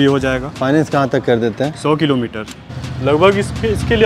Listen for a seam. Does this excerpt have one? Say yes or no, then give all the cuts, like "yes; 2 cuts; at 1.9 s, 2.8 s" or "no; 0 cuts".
yes; 1 cut; at 2.6 s